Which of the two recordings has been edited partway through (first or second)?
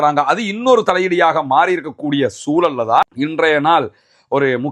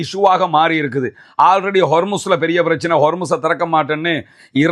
first